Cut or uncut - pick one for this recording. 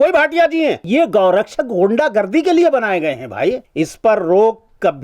cut